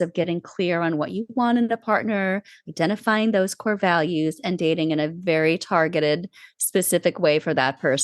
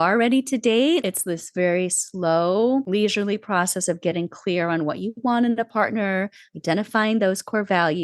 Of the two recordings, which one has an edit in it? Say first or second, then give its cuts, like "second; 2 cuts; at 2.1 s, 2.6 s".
second; 2 cuts; at 1.0 s, 2.9 s